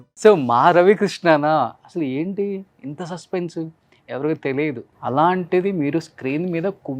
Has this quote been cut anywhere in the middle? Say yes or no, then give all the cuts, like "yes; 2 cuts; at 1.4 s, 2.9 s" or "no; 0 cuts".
yes; 1 cut; at 4.9 s